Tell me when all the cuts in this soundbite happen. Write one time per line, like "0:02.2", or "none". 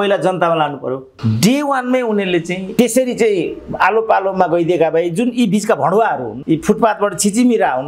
0:01.1
0:02.7
0:06.3